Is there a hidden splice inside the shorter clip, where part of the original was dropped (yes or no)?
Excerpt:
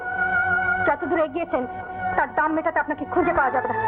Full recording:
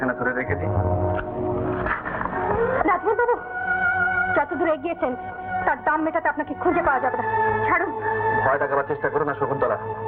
no